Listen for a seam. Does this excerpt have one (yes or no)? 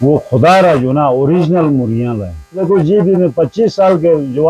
yes